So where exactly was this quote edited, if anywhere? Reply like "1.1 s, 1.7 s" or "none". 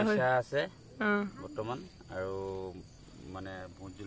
none